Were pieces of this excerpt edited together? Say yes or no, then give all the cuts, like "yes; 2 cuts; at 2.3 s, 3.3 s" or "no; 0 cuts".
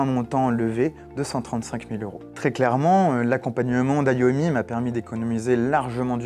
yes; 1 cut; at 2.2 s